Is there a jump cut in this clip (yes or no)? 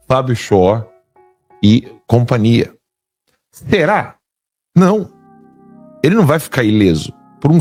no